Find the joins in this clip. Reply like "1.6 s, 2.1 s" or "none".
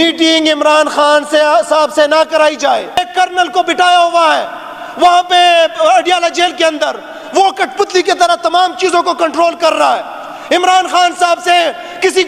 3.1 s